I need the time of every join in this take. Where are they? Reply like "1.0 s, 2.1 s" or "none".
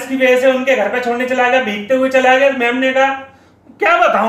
none